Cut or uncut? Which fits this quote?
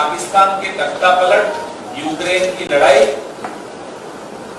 uncut